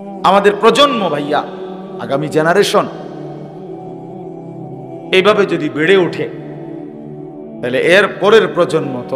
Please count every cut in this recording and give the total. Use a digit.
2